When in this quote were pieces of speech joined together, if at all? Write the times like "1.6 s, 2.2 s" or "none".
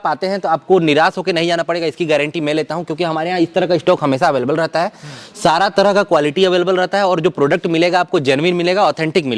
none